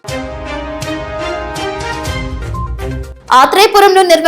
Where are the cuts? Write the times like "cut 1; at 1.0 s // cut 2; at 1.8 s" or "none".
cut 1; at 1.4 s // cut 2; at 2.7 s